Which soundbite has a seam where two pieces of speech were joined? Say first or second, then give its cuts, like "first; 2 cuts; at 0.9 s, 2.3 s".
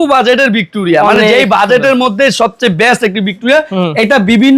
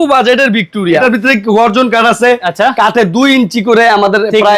second; 1 cut; at 1.0 s